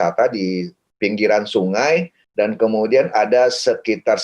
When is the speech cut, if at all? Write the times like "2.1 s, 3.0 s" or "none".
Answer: 2.2 s